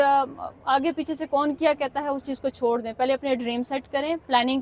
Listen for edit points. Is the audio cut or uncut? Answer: uncut